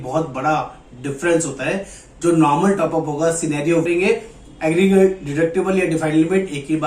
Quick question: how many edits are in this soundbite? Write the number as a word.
one